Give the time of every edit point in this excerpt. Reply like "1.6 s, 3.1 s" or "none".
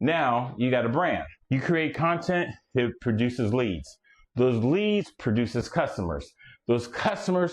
1.3 s